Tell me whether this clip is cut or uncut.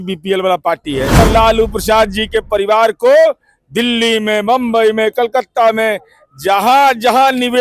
cut